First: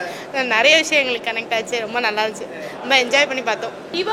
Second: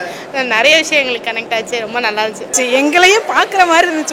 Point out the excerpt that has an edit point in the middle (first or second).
second